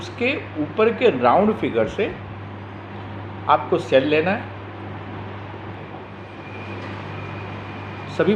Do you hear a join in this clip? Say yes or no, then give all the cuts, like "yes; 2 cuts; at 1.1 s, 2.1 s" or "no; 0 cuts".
yes; 1 cut; at 6.2 s